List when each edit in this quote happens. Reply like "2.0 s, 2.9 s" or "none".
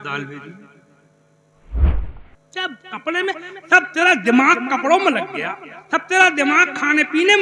1.9 s